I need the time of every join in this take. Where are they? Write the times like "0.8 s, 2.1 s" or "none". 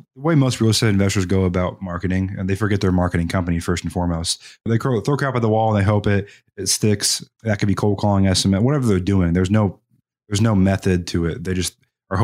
none